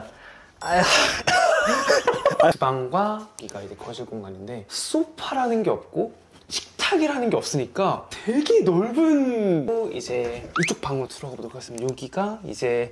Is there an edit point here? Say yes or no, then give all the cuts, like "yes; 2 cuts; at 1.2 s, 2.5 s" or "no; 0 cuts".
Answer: yes; 2 cuts; at 2.5 s, 9.7 s